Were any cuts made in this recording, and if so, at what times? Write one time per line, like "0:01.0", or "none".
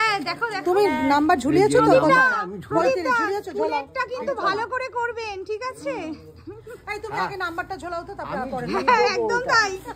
none